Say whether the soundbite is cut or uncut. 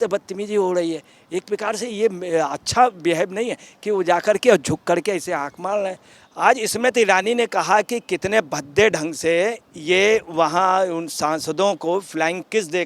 cut